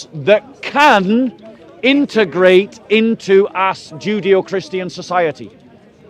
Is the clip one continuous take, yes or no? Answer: yes